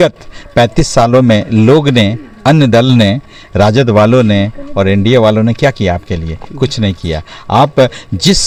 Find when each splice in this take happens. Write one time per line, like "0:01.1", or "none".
none